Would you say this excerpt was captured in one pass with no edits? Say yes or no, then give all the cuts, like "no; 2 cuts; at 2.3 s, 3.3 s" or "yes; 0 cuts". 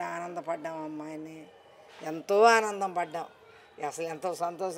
yes; 0 cuts